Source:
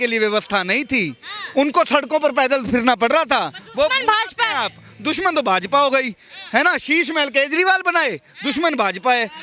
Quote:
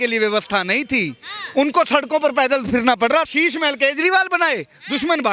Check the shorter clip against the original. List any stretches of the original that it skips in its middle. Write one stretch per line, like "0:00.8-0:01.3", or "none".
0:03.3-0:06.8

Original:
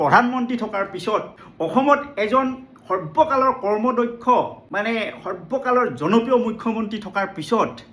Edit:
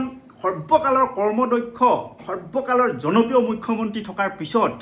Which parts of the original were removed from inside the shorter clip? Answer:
0:04.7-0:05.2

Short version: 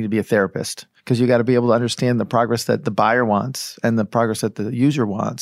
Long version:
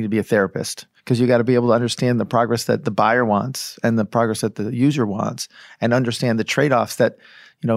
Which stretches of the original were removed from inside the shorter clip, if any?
none

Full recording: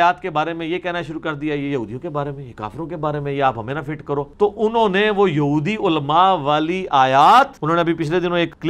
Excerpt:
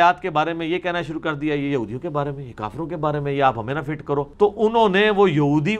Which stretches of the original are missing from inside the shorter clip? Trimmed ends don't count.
none

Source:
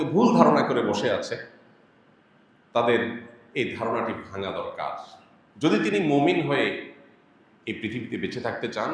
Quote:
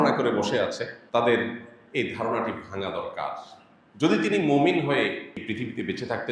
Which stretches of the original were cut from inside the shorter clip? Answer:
0:01.5-0:02.6
0:07.0-0:07.7

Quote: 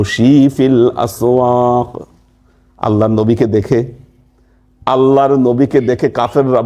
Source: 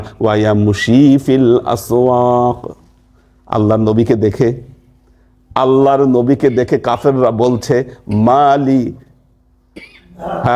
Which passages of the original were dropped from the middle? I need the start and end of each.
none

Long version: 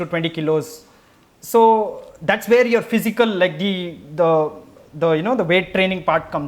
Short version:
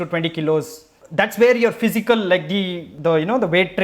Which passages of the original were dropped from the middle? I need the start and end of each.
0:01.0-0:02.1
0:03.9-0:04.8

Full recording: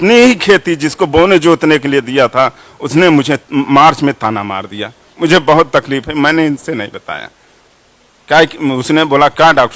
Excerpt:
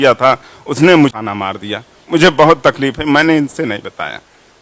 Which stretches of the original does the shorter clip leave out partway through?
0:03.3-0:04.3

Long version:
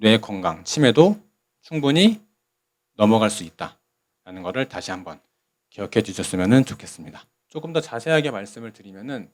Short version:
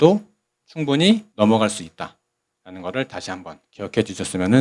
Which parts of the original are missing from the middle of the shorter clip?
0:02.2-0:02.9
0:05.2-0:05.6

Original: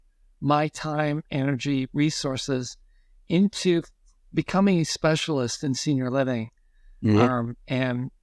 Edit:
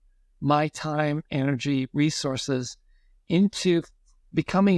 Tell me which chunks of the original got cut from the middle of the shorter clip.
none

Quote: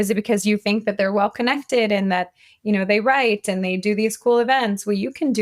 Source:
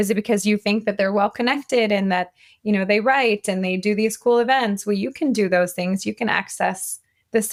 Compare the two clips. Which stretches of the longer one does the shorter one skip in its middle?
none

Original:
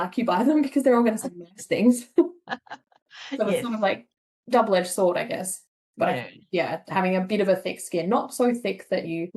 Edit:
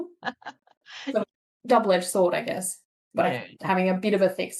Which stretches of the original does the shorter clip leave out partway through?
0:03.5-0:04.0
0:06.4-0:06.8

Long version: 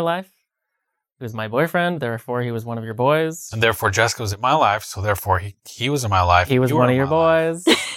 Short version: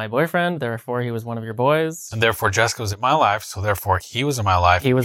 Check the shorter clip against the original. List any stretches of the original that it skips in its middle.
0:05.5-0:05.8

